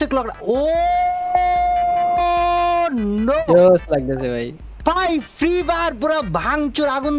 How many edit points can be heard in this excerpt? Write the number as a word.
zero